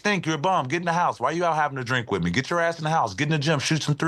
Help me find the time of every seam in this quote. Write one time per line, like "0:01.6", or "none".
none